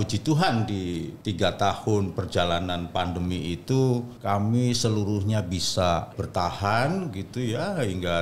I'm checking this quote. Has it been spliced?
yes; 3 cuts; at 1.1 s, 4.1 s, 6.2 s

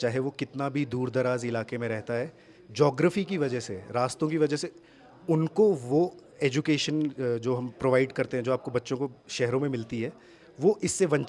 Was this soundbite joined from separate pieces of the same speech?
no; 0 cuts

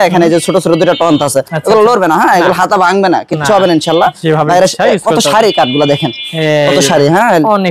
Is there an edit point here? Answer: no; 0 cuts

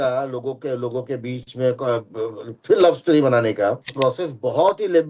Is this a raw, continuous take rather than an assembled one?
no; 1 cut; at 3.9 s

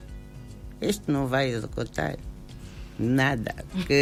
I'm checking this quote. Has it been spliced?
no; 0 cuts

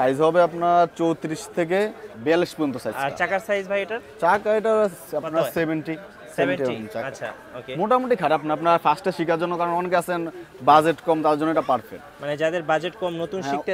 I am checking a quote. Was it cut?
no; 0 cuts

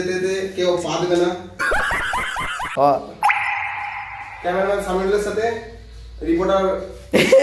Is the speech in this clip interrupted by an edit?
yes; 1 cut; at 2.6 s

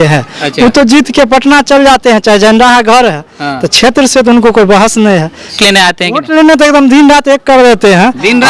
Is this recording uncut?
no; 1 cut; at 5.6 s

